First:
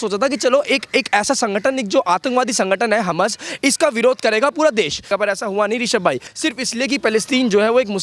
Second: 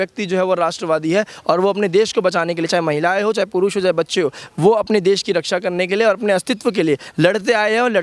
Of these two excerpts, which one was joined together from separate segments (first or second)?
first